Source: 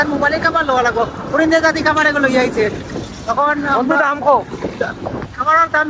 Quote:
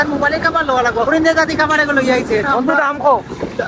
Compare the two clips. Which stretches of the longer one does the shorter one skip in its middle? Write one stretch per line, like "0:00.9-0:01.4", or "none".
0:01.1-0:01.3
0:02.7-0:03.7